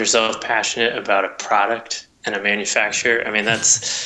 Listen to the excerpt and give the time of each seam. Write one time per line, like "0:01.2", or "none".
none